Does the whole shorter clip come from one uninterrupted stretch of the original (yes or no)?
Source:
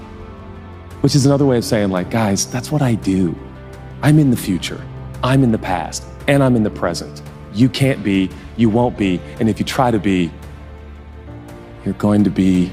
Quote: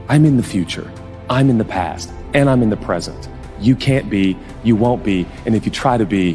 yes